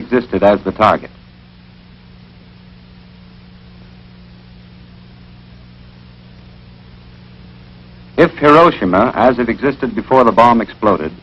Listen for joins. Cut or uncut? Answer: uncut